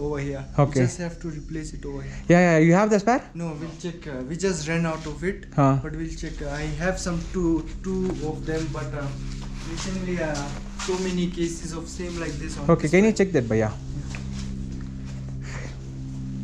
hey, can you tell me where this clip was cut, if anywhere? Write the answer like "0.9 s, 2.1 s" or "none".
none